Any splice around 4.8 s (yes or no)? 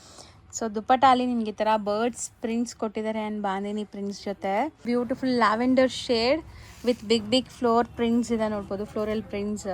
yes